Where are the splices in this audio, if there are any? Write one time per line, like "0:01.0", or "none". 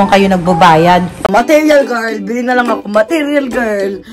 0:01.1